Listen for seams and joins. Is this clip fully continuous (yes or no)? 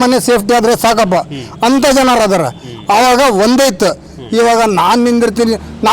yes